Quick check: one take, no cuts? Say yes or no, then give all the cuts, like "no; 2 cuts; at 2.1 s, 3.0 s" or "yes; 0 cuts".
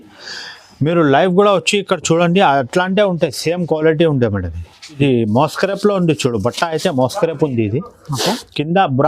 no; 1 cut; at 5.0 s